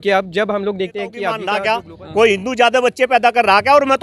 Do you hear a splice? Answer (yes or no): yes